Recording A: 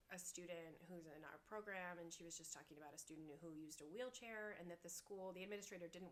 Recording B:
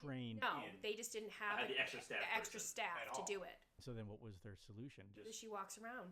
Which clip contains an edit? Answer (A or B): B